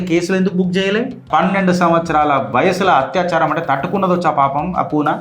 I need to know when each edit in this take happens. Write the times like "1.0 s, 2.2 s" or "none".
1.3 s